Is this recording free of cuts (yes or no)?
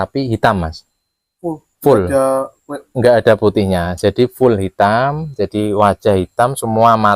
yes